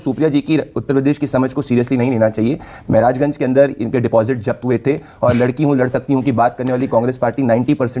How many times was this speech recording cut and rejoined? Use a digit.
0